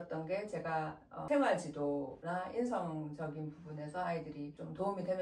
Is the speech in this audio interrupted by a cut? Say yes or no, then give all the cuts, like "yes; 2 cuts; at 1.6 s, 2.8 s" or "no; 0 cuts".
yes; 2 cuts; at 1.2 s, 2.2 s